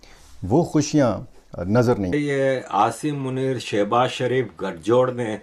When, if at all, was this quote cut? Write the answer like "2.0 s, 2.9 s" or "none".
2.1 s